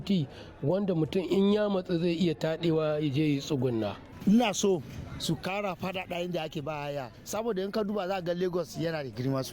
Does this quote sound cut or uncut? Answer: cut